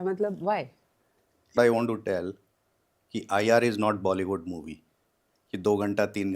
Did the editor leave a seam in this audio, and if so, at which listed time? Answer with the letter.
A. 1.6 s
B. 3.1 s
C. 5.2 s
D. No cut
A